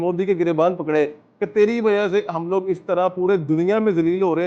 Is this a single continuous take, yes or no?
yes